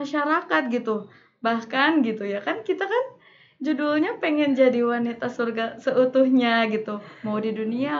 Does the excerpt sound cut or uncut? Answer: uncut